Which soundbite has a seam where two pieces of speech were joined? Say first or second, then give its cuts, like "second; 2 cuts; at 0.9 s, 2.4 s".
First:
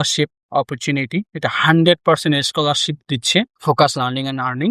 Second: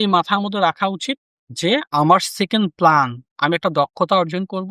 first; 1 cut; at 3.5 s